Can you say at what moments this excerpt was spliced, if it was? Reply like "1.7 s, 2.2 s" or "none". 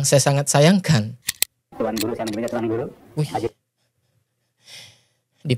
1.2 s

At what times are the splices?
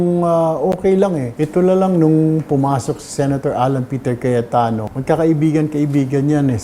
0.8 s, 4.9 s

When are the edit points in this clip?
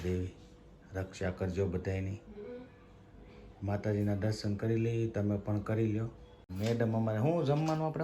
6.4 s

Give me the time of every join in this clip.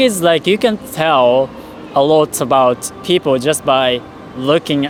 none

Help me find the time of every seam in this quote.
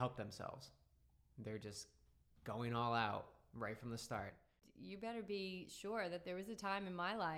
4.6 s

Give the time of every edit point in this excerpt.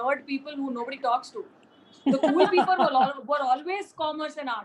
none

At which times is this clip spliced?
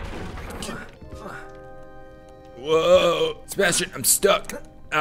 1.0 s, 3.4 s

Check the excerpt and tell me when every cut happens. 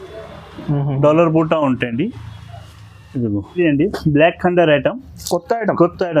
3.5 s

